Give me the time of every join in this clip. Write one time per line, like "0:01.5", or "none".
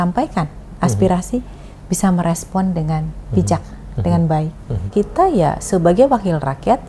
0:04.9

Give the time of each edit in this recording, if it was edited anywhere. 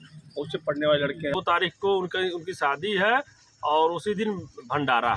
0:01.3

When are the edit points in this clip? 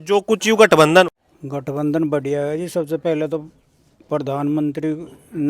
0:01.0

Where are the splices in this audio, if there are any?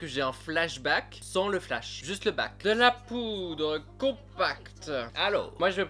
none

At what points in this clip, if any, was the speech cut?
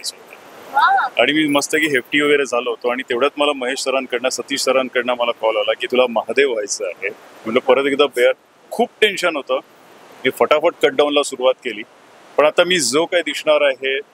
0:05.8

